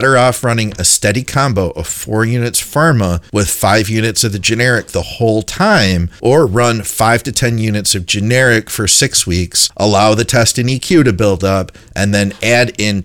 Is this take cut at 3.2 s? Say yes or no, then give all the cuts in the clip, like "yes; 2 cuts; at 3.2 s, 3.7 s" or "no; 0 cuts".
yes; 3 cuts; at 3.2 s, 6.1 s, 9.6 s